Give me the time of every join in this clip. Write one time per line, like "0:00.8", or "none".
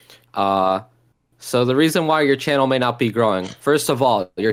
none